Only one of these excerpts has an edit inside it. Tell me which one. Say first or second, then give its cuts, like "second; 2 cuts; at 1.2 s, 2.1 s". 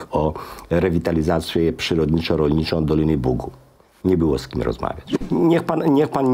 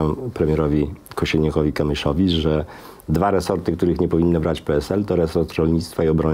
first; 1 cut; at 5.1 s